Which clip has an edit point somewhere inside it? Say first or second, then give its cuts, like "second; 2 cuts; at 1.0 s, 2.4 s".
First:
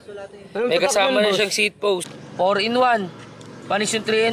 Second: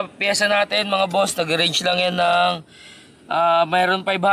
first; 1 cut; at 2.1 s